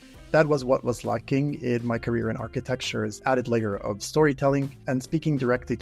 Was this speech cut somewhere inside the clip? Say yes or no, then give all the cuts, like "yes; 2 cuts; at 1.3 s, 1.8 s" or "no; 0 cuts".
yes; 2 cuts; at 3.2 s, 4.8 s